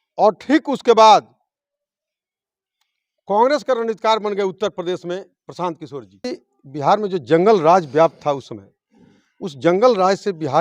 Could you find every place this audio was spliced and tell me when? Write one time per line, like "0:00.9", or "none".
0:06.3